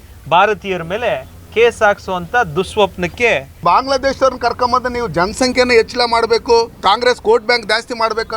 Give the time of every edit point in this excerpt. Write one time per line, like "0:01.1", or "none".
0:03.6